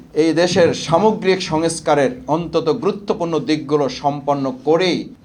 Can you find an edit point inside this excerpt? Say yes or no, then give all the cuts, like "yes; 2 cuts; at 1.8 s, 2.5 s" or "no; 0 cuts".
no; 0 cuts